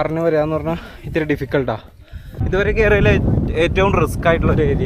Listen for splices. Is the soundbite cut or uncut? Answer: cut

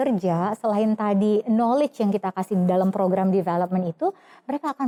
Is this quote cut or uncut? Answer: uncut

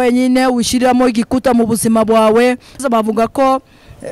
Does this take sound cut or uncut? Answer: cut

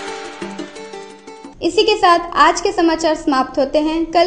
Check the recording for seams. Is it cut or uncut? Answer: uncut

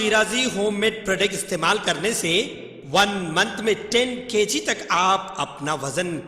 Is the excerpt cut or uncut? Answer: uncut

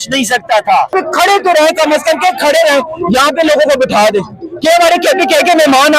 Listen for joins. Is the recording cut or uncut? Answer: cut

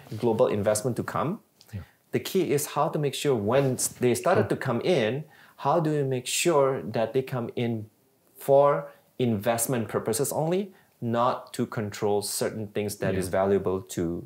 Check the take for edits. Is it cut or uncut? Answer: uncut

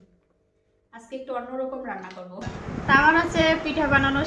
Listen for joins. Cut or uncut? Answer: cut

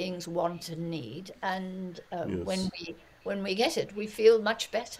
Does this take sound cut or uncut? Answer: uncut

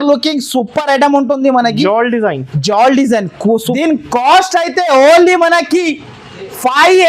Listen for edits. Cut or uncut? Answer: cut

